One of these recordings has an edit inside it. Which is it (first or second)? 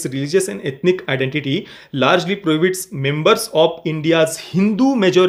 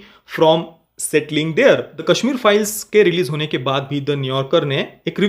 second